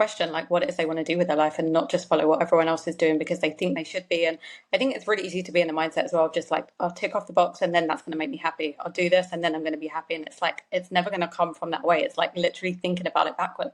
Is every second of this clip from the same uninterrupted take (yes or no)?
yes